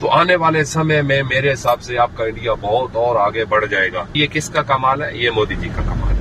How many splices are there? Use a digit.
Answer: 1